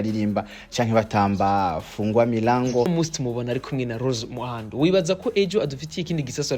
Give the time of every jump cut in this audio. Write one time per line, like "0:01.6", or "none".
0:02.9